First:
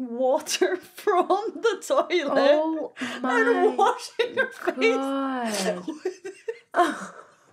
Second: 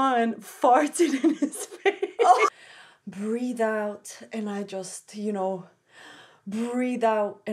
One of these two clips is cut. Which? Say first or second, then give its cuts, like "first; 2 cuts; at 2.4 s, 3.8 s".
second; 1 cut; at 2.6 s